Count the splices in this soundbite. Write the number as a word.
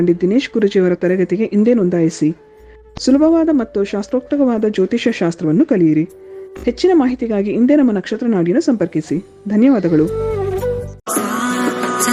one